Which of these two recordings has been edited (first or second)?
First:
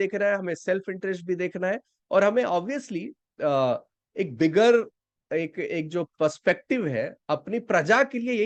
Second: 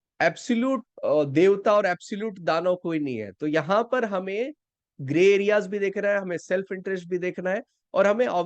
second